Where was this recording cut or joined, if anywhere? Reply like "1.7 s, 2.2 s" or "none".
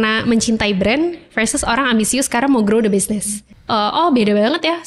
3.5 s

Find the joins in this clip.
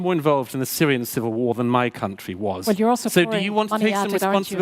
2.7 s

